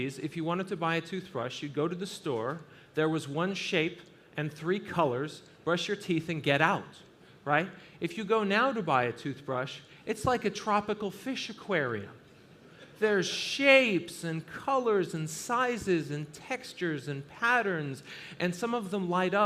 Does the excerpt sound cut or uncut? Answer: cut